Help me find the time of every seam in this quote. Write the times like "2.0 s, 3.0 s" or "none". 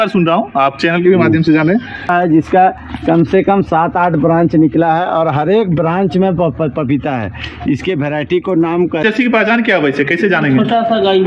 2.1 s, 9.0 s